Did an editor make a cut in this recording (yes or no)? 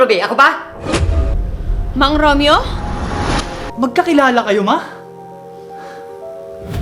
yes